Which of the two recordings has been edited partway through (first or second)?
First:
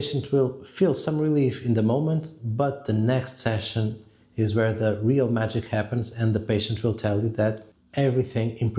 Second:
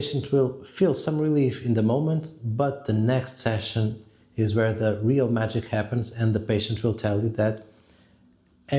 first